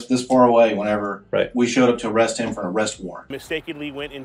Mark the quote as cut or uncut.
cut